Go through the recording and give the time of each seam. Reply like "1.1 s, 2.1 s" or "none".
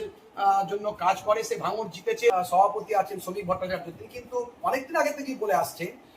2.3 s